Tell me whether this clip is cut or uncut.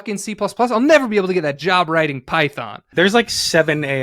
cut